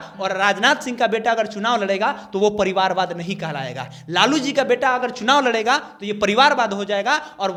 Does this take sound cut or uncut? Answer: uncut